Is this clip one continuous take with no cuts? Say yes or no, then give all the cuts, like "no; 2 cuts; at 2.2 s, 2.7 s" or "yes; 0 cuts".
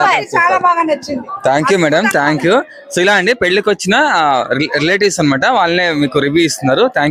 yes; 0 cuts